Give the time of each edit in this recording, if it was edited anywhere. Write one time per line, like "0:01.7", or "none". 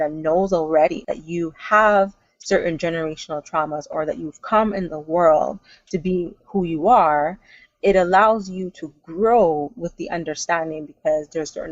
0:01.0